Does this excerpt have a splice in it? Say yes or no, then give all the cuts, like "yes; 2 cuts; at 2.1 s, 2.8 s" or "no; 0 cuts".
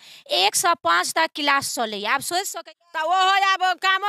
yes; 1 cut; at 2.5 s